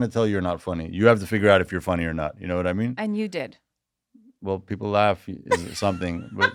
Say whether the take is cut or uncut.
uncut